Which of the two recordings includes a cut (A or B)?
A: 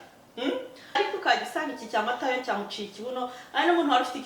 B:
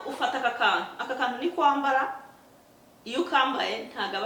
A